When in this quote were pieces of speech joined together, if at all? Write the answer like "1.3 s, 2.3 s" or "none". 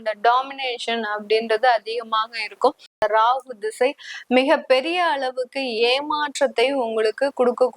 3.0 s